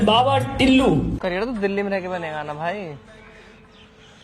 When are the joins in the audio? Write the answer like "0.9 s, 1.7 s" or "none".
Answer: 1.1 s